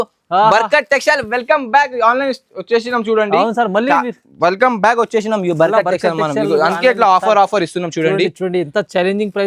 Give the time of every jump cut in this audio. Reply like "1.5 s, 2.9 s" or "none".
none